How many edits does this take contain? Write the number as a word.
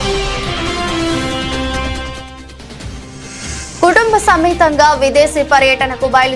one